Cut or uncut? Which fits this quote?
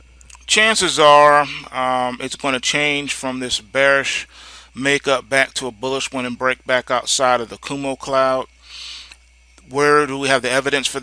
cut